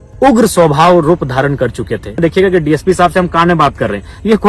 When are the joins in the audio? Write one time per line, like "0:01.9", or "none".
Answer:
0:02.2